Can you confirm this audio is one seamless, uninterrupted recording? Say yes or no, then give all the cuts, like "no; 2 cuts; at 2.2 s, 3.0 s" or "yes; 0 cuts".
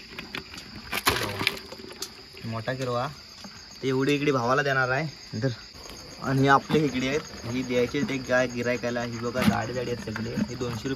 no; 1 cut; at 5.7 s